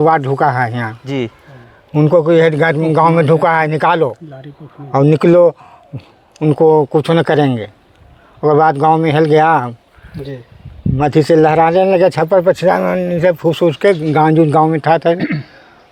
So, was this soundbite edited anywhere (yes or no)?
no